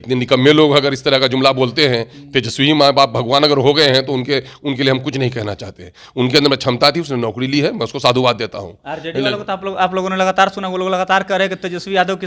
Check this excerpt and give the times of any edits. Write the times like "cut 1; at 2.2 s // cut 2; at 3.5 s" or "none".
none